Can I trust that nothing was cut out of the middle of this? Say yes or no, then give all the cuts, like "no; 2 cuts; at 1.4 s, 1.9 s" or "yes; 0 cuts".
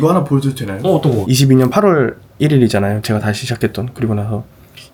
yes; 0 cuts